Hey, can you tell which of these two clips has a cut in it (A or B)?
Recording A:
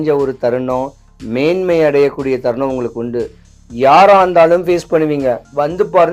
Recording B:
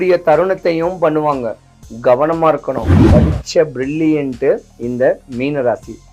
B